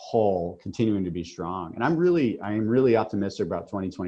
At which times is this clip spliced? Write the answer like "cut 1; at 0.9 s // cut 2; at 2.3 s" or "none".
none